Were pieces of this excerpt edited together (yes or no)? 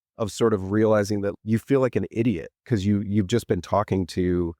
yes